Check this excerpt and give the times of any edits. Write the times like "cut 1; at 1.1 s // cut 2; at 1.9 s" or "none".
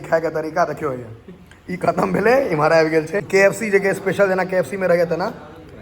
cut 1; at 3.2 s